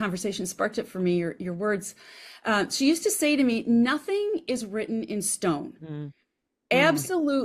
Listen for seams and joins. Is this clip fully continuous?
yes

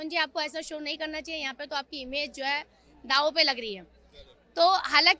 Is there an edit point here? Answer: no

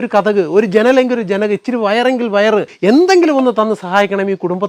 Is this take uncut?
no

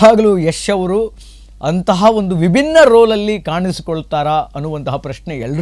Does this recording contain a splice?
no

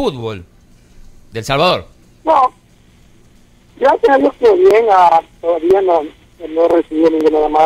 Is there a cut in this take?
yes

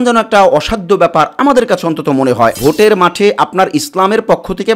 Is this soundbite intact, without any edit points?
no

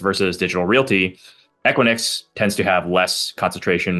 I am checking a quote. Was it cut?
no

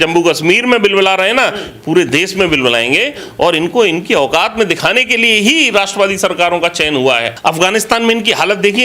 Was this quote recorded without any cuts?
no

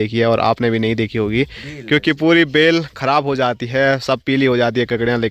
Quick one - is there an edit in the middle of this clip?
no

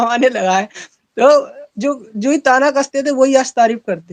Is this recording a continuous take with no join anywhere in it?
yes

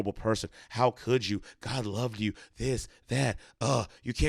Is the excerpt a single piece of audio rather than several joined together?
yes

